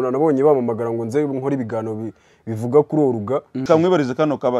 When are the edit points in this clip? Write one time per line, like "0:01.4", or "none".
0:03.6